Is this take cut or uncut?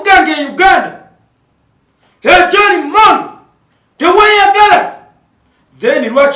uncut